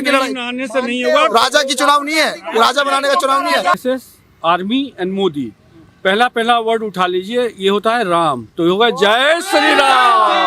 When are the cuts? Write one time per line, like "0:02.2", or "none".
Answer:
0:03.8